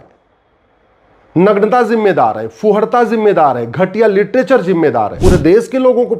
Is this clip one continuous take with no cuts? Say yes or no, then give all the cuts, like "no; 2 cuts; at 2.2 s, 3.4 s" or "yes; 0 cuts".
no; 1 cut; at 5.1 s